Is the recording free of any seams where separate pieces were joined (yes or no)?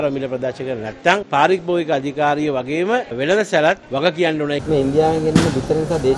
no